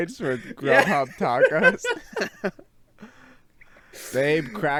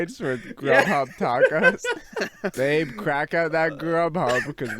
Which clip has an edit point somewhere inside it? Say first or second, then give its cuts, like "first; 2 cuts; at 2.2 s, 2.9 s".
second; 1 cut; at 2.5 s